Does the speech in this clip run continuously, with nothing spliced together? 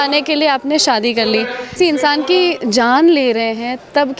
no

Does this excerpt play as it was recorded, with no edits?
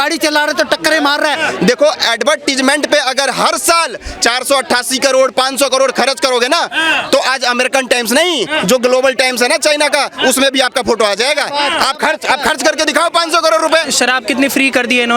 no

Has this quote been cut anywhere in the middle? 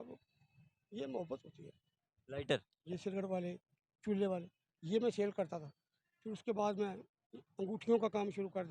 yes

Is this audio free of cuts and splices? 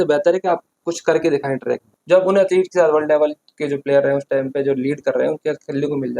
no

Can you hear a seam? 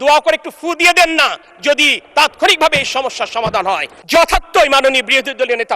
yes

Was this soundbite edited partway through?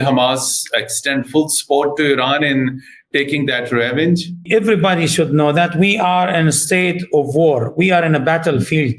yes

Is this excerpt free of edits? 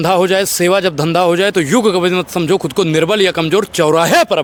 yes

